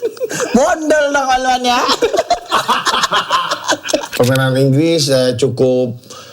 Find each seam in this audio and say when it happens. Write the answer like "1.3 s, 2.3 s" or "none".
4.1 s